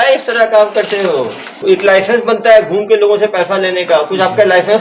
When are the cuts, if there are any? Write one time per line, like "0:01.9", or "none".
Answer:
0:01.6